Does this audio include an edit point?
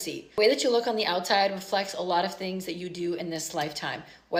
no; 0 cuts

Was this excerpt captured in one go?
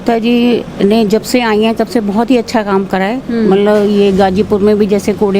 yes; 0 cuts

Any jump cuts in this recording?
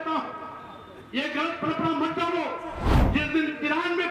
yes; 1 cut; at 2.9 s

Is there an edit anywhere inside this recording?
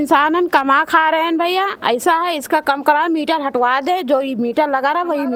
no; 0 cuts

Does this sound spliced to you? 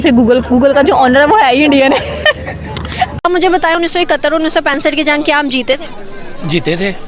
yes; 1 cut; at 3.1 s

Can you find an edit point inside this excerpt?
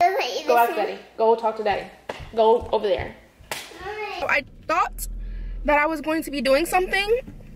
yes; 1 cut; at 4.2 s

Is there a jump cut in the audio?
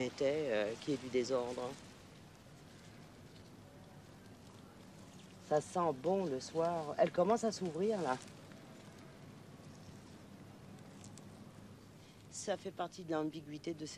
no; 0 cuts

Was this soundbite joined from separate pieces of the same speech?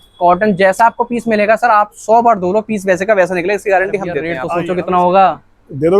yes; 1 cut; at 4.3 s

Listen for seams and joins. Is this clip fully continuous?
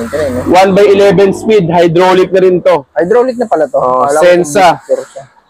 yes; 0 cuts

